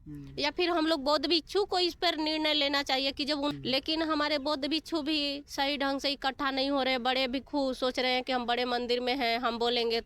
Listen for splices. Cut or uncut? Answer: cut